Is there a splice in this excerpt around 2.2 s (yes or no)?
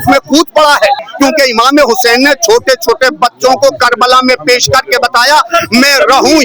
no